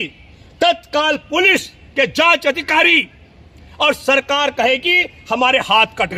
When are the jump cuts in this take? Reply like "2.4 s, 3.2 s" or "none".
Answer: none